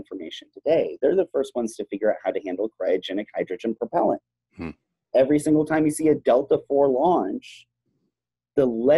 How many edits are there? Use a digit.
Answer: 0